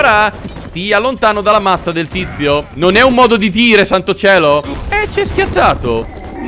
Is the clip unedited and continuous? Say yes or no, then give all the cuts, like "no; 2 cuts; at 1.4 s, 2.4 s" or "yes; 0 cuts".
no; 1 cut; at 4.8 s